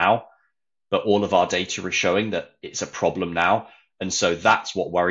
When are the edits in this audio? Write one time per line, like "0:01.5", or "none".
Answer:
none